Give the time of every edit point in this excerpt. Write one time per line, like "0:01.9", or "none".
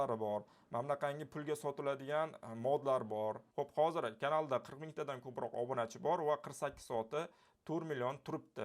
0:03.4